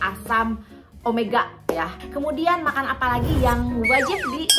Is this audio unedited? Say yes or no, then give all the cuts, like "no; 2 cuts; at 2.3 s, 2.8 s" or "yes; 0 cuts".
no; 1 cut; at 1.9 s